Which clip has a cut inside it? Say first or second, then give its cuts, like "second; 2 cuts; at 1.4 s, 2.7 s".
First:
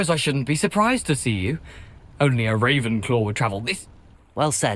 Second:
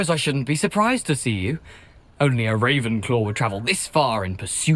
first; 1 cut; at 3.8 s